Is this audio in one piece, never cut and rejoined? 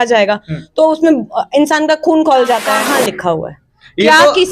no; 1 cut; at 2.7 s

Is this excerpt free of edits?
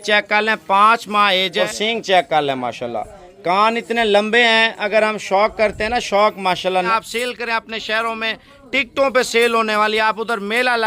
no; 2 cuts; at 1.6 s, 6.9 s

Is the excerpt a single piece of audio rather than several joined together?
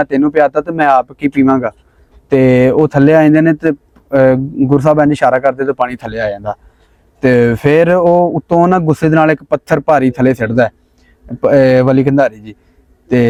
yes; 0 cuts

